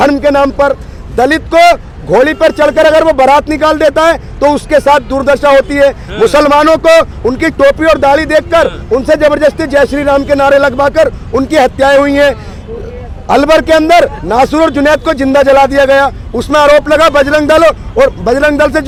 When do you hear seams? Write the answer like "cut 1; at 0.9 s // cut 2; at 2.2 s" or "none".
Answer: none